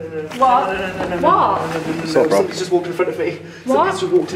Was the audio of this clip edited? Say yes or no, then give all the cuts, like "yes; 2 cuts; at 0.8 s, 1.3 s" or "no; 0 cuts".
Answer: no; 0 cuts